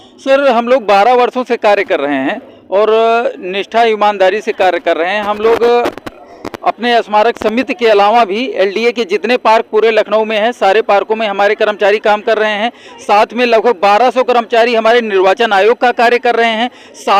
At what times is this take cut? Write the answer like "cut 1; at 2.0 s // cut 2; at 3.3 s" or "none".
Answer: none